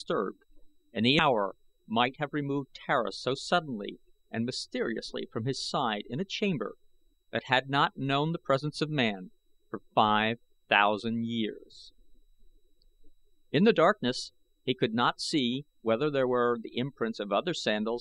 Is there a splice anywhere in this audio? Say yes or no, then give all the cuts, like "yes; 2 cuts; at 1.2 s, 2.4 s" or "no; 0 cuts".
no; 0 cuts